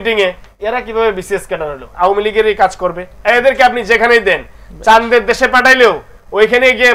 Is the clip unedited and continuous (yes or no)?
no